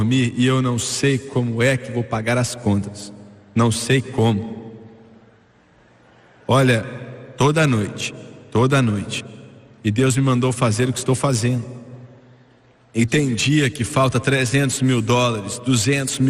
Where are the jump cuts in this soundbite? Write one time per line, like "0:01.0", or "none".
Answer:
none